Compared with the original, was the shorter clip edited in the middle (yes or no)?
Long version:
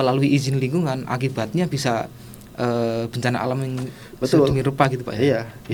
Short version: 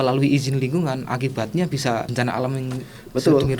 yes